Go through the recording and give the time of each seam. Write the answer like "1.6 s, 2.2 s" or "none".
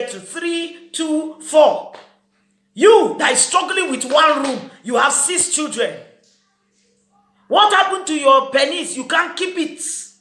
none